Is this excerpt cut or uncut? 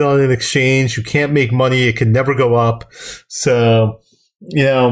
uncut